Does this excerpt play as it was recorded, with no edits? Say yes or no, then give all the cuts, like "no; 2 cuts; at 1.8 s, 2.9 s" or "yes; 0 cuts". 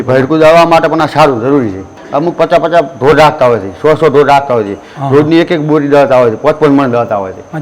no; 1 cut; at 2.0 s